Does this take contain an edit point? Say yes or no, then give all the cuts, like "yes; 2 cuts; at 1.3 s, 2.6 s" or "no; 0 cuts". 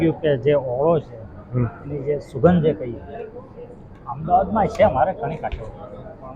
no; 0 cuts